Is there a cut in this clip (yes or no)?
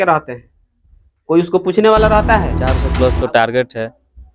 yes